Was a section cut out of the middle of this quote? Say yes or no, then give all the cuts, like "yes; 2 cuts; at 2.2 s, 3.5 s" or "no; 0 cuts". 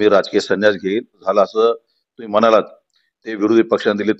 yes; 1 cut; at 1.2 s